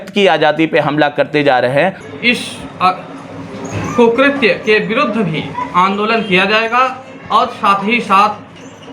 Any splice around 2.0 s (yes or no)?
yes